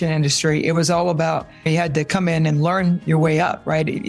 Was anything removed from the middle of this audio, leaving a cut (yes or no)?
yes